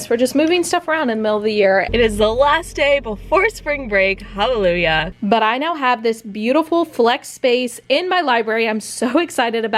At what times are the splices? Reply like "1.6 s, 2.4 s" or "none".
1.9 s, 5.1 s